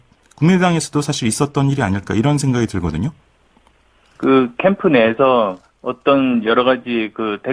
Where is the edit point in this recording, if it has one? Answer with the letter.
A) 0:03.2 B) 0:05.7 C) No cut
C